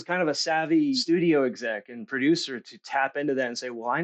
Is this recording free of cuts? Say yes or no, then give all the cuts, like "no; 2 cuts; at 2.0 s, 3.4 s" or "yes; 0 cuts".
no; 1 cut; at 1.0 s